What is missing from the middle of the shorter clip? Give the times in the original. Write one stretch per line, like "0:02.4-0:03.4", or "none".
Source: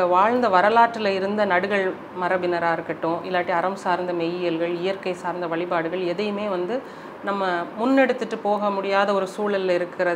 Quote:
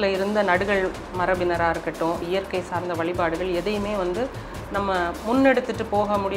0:03.3-0:04.8